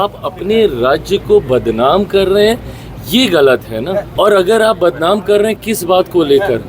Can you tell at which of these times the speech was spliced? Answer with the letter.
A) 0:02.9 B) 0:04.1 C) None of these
B